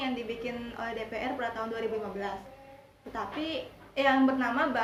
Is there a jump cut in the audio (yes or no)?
no